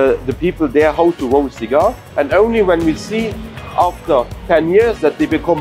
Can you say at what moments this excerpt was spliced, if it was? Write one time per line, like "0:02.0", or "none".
0:02.0
0:04.4